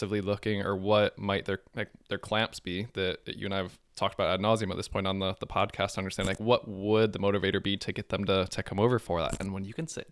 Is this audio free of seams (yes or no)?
yes